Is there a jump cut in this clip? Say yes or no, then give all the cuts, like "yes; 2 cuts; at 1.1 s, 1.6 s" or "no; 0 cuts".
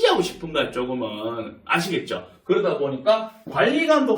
no; 0 cuts